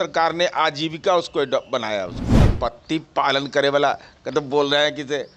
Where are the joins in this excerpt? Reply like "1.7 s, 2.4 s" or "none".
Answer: 2.5 s